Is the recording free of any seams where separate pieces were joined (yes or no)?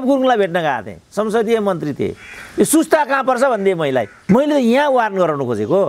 no